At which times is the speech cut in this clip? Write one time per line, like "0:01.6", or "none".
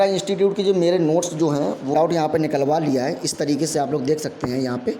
0:01.9

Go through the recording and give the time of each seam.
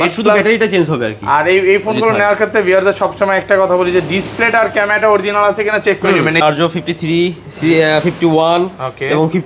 0:06.4

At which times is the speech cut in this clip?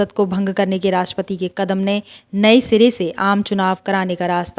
none

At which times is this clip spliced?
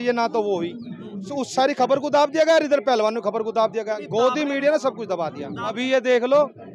0:01.3
0:05.8

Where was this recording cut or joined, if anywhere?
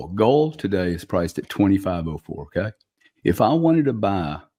none

